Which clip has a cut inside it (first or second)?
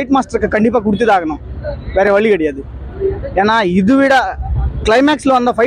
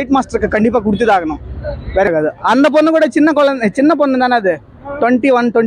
second